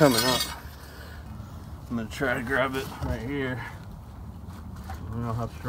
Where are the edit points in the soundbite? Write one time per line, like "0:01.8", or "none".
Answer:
0:01.1